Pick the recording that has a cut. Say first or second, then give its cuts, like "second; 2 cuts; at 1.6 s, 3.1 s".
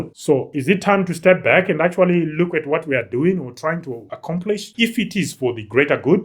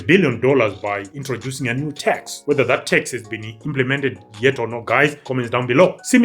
first; 1 cut; at 4.7 s